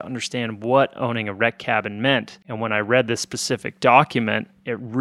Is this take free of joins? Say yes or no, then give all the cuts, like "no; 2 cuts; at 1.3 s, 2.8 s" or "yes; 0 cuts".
yes; 0 cuts